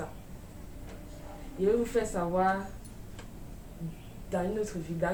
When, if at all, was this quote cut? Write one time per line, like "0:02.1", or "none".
none